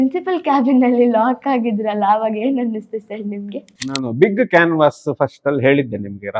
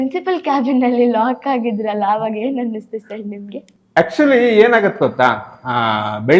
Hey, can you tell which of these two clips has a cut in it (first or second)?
first